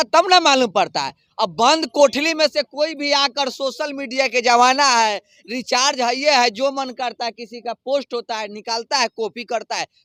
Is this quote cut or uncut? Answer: uncut